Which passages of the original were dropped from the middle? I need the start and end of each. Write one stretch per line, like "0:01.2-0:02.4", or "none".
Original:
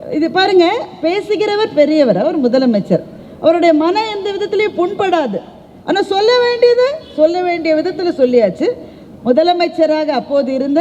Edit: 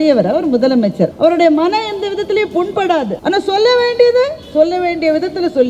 0:03.0-0:03.4
0:05.4-0:05.8